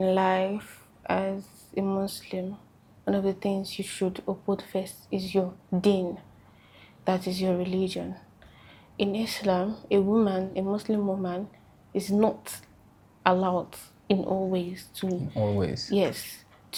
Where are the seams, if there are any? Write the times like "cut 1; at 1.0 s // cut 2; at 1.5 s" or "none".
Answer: none